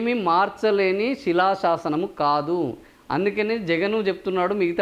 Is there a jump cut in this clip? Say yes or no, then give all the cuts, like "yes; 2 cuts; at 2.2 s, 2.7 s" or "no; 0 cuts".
no; 0 cuts